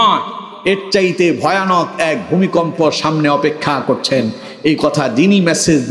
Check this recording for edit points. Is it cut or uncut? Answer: uncut